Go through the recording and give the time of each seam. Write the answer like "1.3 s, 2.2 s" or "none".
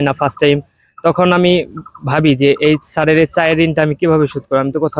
none